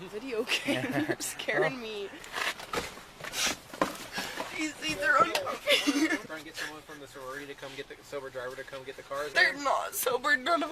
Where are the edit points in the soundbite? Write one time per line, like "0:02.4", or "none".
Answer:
0:02.2
0:06.2
0:09.3